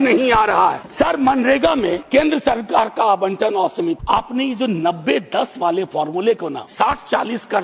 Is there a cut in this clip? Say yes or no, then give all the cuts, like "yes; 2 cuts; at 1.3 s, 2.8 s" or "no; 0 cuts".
yes; 4 cuts; at 0.8 s, 2.0 s, 4.0 s, 6.6 s